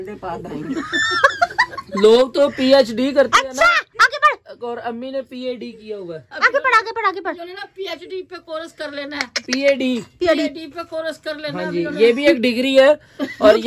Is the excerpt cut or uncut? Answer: uncut